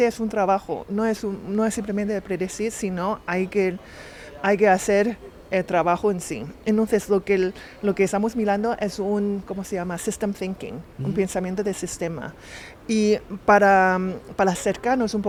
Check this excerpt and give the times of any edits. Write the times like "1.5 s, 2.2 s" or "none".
none